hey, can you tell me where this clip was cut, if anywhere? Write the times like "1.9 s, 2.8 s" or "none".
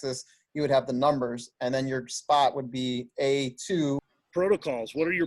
4.1 s